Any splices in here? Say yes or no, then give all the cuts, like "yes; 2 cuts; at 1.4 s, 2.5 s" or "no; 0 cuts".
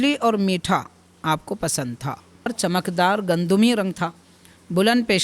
yes; 1 cut; at 2.5 s